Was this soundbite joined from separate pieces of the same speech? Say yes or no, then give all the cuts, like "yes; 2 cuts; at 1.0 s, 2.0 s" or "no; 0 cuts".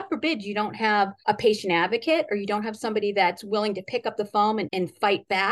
yes; 1 cut; at 1.2 s